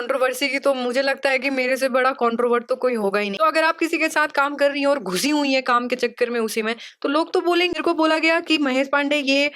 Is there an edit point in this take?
yes; 2 cuts; at 3.4 s, 7.8 s

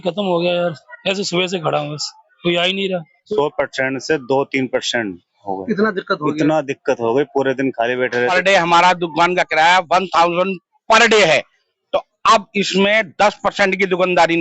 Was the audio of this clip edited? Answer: yes; 2 cuts; at 3.2 s, 8.2 s

